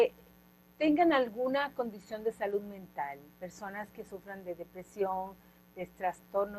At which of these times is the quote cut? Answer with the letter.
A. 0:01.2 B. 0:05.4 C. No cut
C